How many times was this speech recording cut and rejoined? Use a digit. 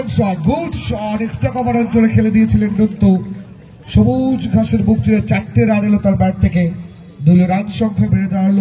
0